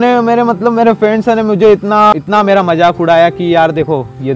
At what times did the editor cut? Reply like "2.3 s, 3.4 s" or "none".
2.1 s